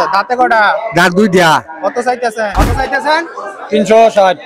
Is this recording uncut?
no; 1 cut; at 2.5 s

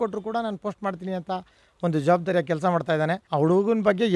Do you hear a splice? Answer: yes; 1 cut; at 3.2 s

